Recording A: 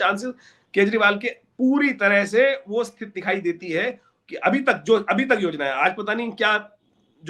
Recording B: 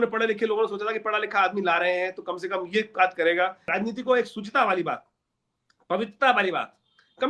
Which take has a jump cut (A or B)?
B